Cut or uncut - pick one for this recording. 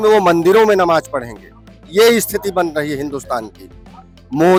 uncut